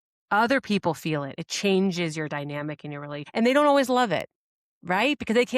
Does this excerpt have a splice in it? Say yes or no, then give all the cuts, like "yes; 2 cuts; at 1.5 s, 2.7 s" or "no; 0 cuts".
yes; 1 cut; at 3.2 s